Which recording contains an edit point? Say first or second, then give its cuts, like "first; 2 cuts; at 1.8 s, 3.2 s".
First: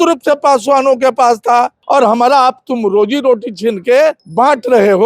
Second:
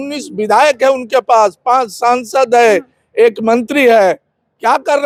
first; 2 cuts; at 1.8 s, 4.2 s